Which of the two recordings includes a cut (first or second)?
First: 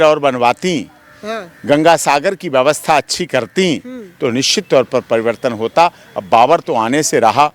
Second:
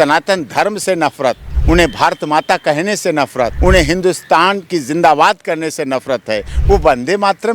second